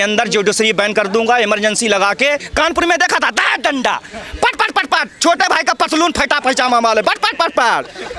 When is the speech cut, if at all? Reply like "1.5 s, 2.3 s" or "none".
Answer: 2.5 s